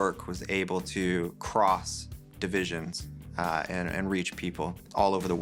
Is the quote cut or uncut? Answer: uncut